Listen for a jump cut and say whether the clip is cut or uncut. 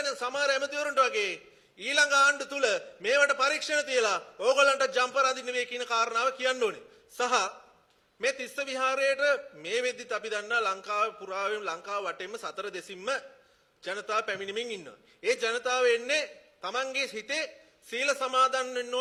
uncut